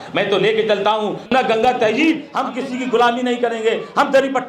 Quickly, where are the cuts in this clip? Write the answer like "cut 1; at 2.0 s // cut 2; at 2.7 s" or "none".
cut 1; at 1.2 s // cut 2; at 2.3 s